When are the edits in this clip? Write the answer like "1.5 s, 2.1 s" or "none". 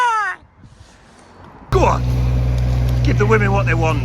1.7 s